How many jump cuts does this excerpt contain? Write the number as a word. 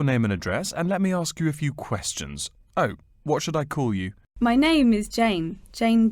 one